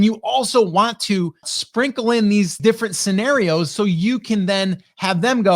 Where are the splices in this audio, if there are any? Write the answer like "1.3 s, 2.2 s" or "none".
1.6 s, 2.6 s